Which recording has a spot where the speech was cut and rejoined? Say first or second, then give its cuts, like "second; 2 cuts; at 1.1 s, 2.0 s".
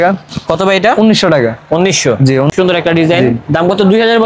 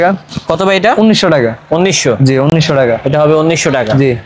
first; 1 cut; at 2.5 s